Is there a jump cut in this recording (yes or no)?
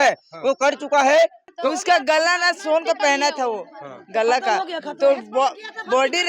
yes